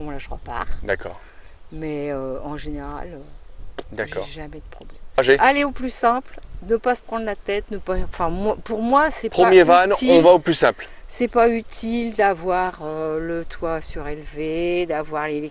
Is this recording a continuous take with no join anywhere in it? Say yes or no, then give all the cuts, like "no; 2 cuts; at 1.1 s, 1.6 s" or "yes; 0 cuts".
no; 1 cut; at 5.2 s